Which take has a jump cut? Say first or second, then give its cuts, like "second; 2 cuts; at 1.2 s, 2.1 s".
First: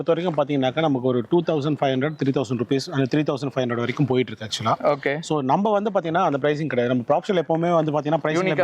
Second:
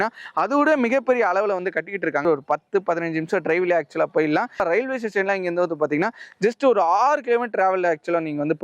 second; 2 cuts; at 2.2 s, 4.9 s